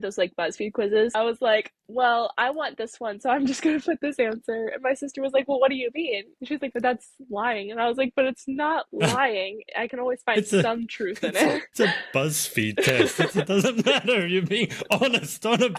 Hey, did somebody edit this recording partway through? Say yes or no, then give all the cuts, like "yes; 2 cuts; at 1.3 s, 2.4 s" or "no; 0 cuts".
yes; 3 cuts; at 1.1 s, 6.3 s, 11.7 s